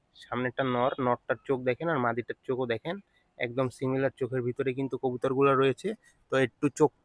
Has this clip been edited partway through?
no; 0 cuts

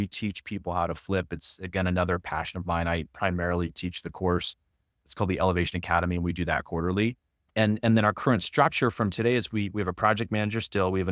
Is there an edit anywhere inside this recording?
no; 0 cuts

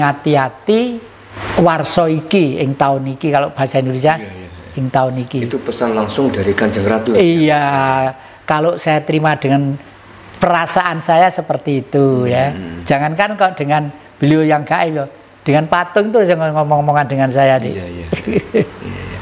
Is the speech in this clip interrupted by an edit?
yes; 1 cut; at 1.4 s

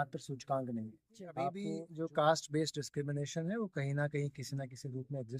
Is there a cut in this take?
yes; 1 cut; at 1.9 s

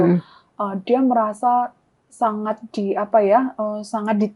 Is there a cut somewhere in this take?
no; 0 cuts

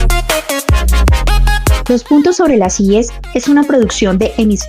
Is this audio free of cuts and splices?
no; 1 cut; at 1.8 s

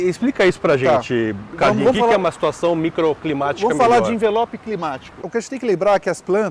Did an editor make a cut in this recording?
yes; 1 cut; at 5.2 s

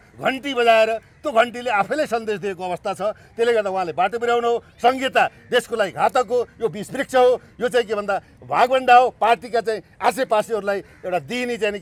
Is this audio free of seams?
yes; 0 cuts

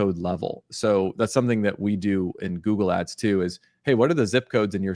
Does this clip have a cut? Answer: no; 0 cuts

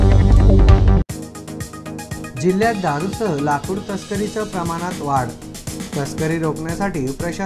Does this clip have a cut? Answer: yes; 1 cut; at 2.2 s

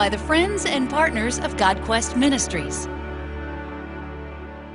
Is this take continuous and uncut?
yes; 0 cuts

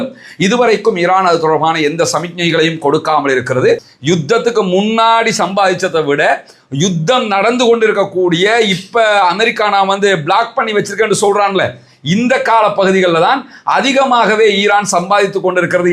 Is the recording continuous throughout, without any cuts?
no; 1 cut; at 3.9 s

